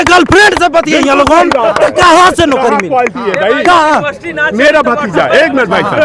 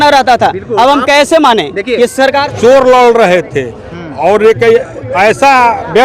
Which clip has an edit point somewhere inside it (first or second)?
second